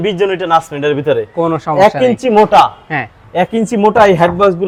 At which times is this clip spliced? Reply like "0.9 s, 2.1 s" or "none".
none

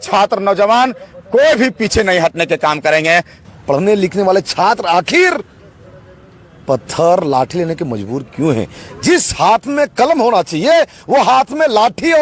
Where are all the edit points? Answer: 3.4 s

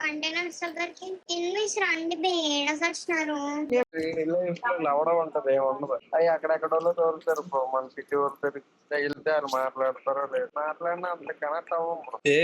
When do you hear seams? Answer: 3.8 s

